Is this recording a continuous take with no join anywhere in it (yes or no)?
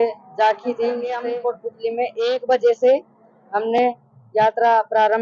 no